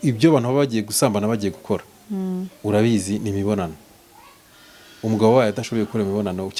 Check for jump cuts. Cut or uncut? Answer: uncut